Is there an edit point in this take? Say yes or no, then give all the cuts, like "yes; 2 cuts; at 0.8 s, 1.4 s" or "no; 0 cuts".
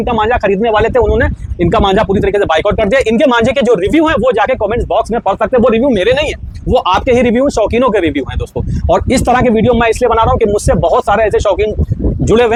no; 0 cuts